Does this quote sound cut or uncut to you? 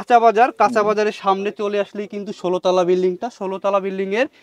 uncut